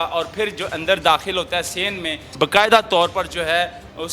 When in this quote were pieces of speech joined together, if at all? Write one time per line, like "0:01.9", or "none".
0:02.2